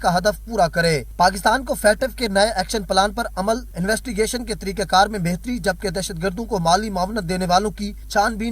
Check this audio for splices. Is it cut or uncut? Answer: cut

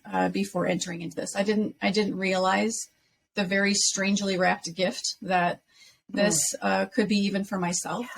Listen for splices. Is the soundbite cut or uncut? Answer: uncut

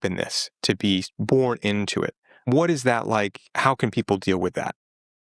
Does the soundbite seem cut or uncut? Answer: uncut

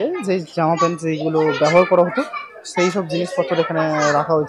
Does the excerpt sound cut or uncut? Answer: uncut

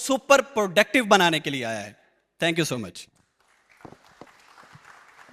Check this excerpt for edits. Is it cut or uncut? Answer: uncut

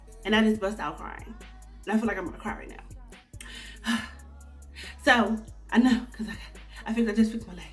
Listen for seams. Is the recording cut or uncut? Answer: uncut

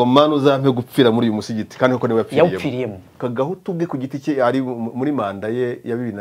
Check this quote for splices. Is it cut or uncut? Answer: cut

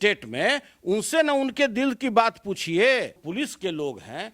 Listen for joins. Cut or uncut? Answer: cut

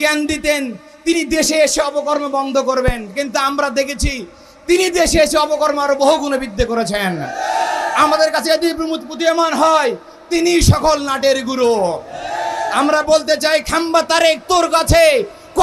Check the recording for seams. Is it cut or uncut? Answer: uncut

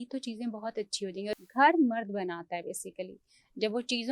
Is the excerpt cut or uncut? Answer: cut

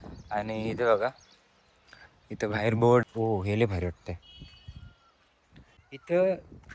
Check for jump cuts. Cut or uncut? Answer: cut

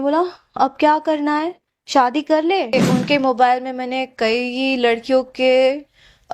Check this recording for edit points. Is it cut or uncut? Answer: cut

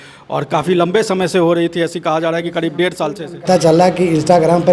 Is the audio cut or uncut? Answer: cut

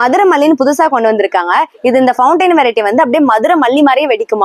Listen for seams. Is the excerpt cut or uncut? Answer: uncut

